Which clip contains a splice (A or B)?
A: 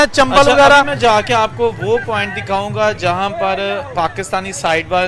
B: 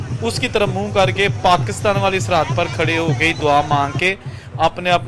A